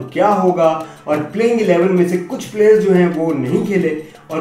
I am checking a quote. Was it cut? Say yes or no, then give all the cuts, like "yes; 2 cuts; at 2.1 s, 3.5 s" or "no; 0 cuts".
no; 0 cuts